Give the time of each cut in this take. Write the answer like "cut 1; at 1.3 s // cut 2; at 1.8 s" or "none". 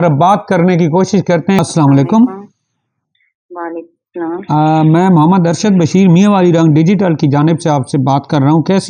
cut 1; at 1.6 s